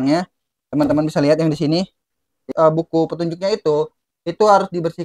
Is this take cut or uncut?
cut